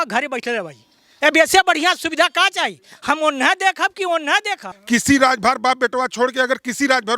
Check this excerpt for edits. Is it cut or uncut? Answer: cut